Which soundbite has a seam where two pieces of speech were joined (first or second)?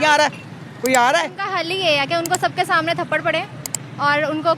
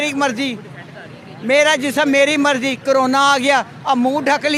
first